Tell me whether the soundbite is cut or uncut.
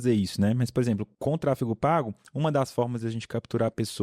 cut